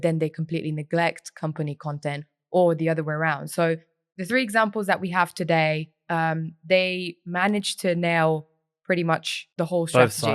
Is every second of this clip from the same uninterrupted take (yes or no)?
no